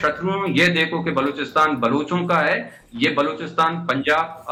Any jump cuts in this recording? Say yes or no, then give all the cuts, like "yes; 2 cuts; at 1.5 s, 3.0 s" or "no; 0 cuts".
no; 0 cuts